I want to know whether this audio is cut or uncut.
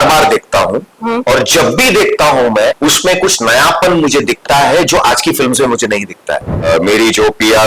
cut